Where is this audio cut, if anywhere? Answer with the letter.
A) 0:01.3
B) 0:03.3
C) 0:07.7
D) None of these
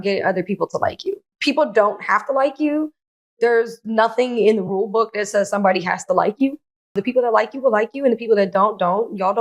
A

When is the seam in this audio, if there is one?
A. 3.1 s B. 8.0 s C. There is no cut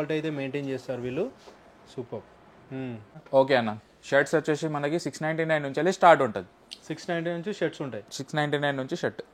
A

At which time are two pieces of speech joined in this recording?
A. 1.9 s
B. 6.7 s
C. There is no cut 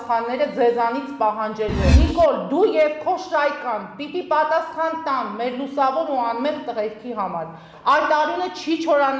A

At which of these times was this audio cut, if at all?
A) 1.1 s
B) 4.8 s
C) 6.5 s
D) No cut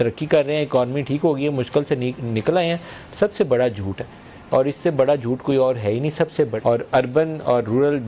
C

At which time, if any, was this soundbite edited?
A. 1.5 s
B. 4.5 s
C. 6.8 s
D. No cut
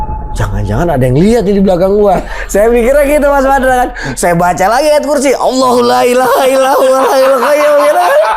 D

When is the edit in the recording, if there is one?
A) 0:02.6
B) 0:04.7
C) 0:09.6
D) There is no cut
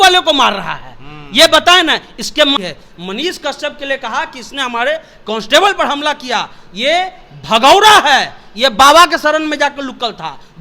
A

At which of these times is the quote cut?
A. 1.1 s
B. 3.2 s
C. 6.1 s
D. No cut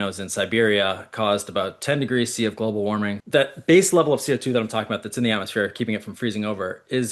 B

